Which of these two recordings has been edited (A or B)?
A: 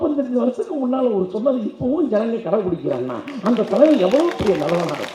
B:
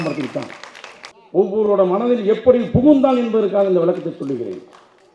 B